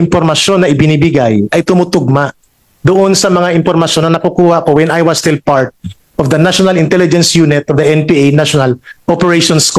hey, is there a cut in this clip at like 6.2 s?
no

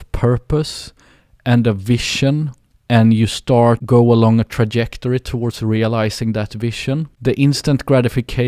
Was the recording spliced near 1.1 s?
no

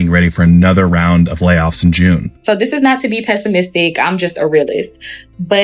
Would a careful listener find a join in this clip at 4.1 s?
no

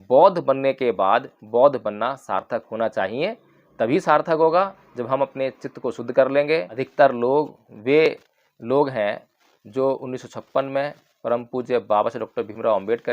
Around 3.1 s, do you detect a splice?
no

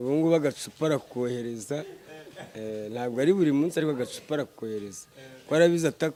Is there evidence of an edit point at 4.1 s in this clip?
no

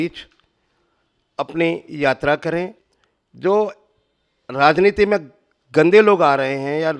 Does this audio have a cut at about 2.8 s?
yes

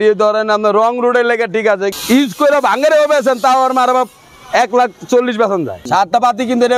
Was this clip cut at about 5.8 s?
yes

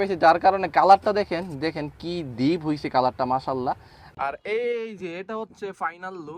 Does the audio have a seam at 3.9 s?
yes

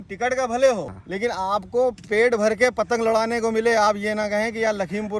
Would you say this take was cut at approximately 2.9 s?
no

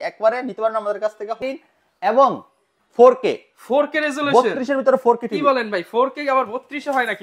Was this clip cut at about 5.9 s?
no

